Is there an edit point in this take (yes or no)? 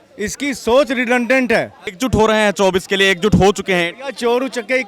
yes